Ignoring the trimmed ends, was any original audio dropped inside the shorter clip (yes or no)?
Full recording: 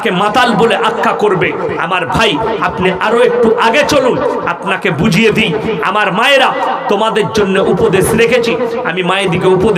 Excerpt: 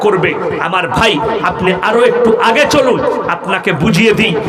no